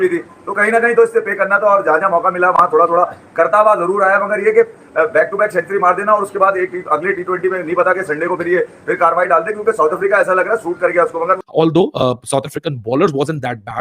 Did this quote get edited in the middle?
yes; 1 cut; at 11.5 s

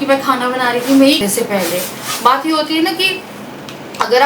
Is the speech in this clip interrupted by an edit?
yes; 1 cut; at 1.2 s

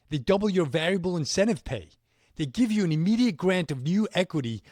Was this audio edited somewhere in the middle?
no; 0 cuts

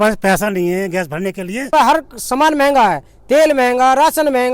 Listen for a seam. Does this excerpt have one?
yes; 1 cut; at 1.7 s

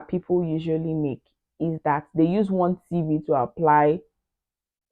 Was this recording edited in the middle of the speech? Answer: no; 0 cuts

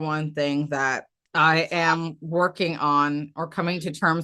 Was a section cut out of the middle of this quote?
yes; 1 cut; at 1.1 s

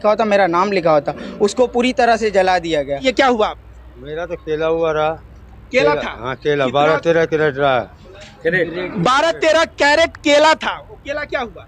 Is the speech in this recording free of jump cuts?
no; 1 cut; at 3.0 s

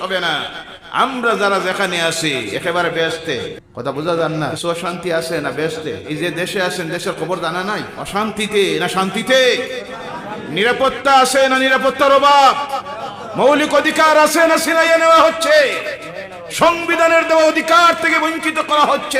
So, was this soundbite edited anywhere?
yes; 4 cuts; at 3.6 s, 4.6 s, 6.0 s, 8.0 s

